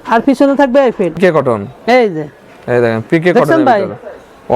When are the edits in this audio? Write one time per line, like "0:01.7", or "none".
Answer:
0:01.2